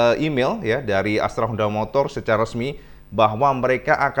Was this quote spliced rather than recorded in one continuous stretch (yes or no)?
no